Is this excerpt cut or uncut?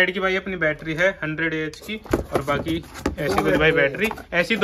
uncut